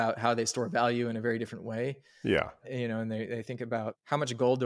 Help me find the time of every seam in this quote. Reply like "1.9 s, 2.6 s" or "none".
2.6 s

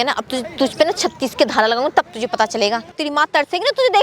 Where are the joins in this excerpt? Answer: 3.0 s

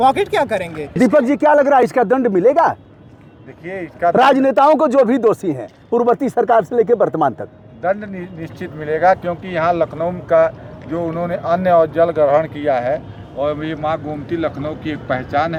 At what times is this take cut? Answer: none

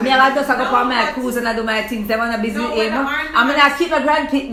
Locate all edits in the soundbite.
none

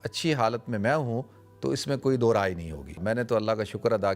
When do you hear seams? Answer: 3.0 s

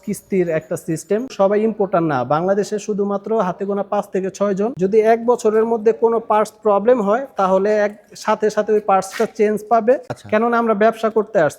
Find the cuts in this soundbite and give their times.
1.3 s, 4.7 s, 10.1 s

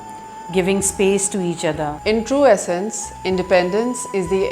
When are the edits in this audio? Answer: 2.0 s

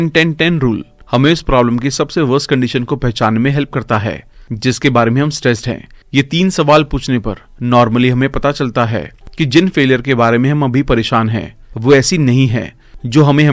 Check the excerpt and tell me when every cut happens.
none

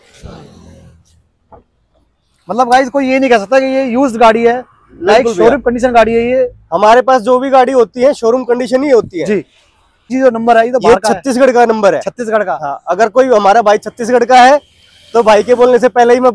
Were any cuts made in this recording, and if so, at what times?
10.0 s

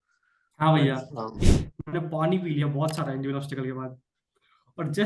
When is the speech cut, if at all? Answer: 1.4 s

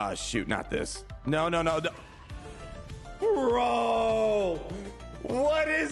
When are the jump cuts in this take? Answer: none

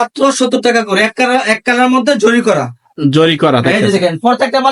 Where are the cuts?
none

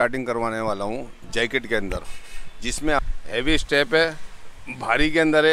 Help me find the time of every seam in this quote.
3.0 s

